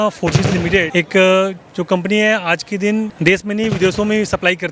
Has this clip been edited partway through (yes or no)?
yes